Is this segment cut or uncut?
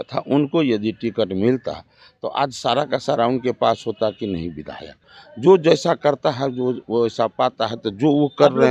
cut